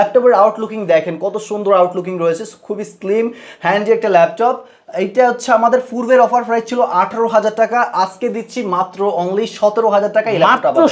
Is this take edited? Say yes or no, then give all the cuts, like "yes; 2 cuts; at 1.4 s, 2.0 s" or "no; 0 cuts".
no; 0 cuts